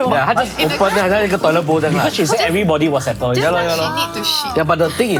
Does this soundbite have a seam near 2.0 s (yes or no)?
no